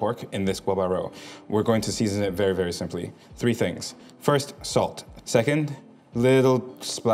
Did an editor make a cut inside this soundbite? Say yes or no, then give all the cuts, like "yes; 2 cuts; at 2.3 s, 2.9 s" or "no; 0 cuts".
yes; 1 cut; at 5.1 s